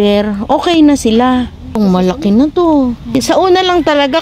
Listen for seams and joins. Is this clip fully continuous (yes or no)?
no